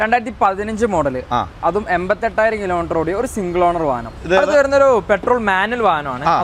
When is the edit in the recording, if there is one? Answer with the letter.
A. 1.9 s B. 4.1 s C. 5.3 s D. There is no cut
B